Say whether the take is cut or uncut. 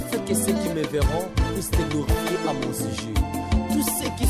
uncut